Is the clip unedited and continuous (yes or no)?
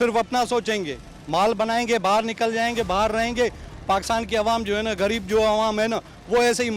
yes